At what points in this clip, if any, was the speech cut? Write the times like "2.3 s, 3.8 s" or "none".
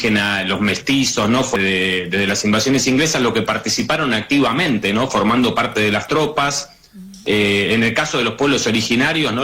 1.6 s